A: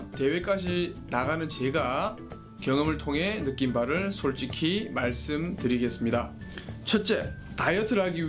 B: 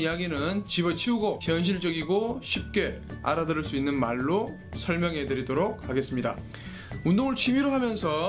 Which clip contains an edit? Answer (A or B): B